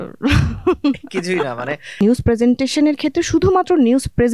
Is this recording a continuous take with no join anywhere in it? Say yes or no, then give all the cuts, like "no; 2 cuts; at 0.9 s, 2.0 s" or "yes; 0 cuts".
no; 1 cut; at 2.0 s